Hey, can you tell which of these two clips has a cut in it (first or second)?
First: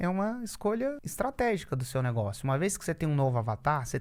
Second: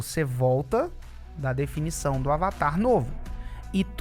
first